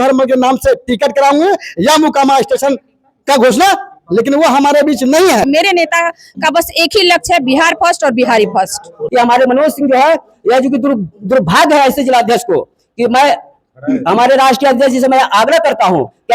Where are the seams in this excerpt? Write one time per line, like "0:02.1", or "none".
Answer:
0:05.5
0:09.0